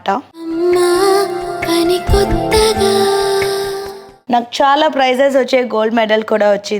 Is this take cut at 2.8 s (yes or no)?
no